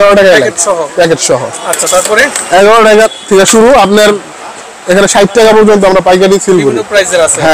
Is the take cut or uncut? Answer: uncut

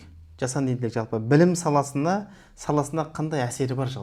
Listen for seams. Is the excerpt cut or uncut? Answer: uncut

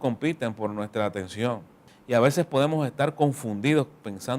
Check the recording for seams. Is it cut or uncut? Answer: cut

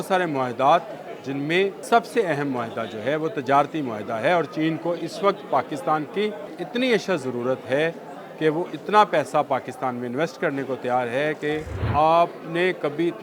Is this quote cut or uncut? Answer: cut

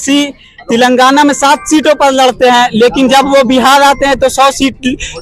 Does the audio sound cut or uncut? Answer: uncut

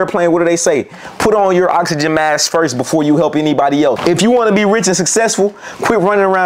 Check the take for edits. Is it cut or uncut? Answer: cut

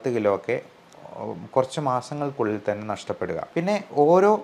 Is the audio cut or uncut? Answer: cut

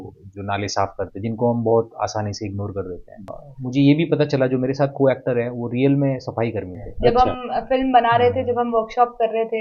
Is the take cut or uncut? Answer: cut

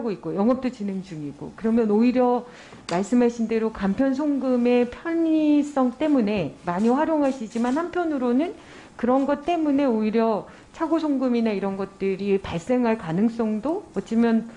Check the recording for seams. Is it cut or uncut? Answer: uncut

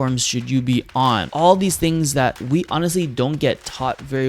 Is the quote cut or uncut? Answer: cut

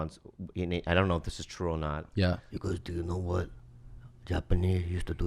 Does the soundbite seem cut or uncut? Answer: cut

